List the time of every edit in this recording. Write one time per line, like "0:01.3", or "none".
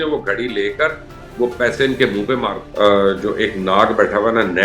0:02.6